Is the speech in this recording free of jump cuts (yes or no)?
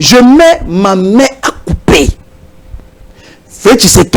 yes